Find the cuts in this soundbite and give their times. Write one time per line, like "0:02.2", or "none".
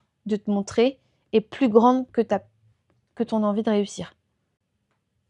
none